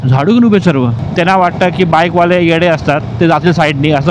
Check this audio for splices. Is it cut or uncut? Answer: cut